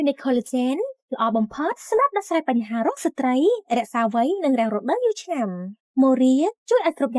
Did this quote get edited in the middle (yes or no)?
no